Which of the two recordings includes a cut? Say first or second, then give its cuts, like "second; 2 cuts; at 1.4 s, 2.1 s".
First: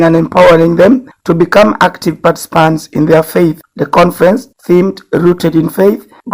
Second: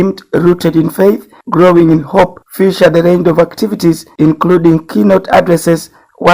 second; 1 cut; at 4.9 s